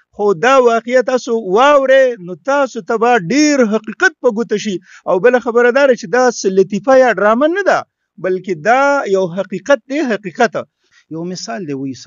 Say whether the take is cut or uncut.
cut